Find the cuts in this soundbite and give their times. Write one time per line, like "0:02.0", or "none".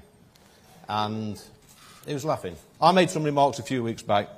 0:02.6